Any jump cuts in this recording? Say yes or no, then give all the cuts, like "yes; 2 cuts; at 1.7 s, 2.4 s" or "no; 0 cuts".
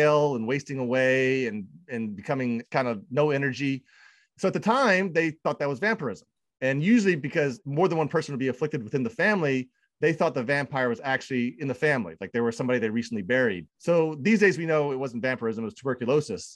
no; 0 cuts